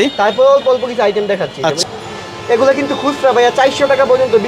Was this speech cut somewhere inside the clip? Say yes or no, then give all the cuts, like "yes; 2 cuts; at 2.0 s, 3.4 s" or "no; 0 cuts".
yes; 1 cut; at 1.8 s